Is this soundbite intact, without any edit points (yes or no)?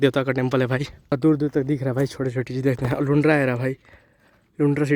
no